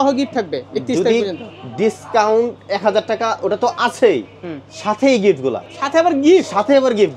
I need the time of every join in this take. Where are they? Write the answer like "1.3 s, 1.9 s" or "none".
5.7 s